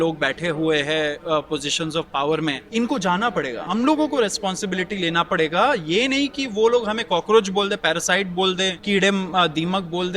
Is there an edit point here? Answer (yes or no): yes